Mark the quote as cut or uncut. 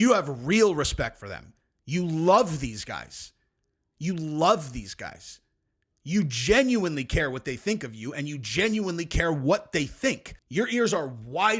cut